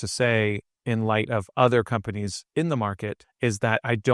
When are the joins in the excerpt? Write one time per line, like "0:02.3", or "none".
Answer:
0:03.2